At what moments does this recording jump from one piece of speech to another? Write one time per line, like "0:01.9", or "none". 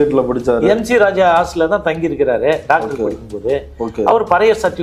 none